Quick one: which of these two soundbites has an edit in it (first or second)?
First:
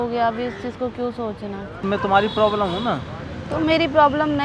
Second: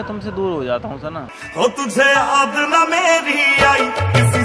first